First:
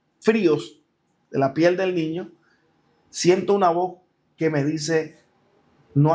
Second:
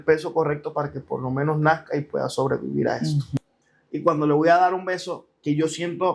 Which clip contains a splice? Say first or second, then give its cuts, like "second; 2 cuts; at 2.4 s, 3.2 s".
second; 1 cut; at 3.4 s